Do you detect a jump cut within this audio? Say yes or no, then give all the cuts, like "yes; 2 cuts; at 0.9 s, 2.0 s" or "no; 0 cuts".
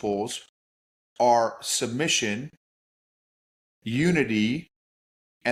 no; 0 cuts